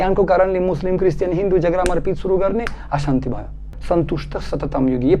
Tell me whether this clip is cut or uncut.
cut